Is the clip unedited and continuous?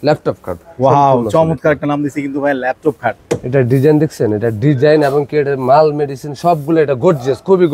yes; 0 cuts

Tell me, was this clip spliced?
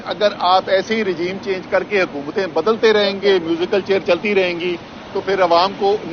no; 0 cuts

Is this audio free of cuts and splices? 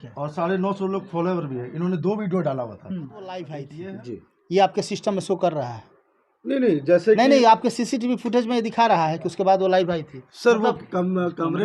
no; 1 cut; at 3.7 s

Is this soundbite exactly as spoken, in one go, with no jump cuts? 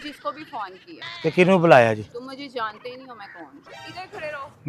yes; 0 cuts

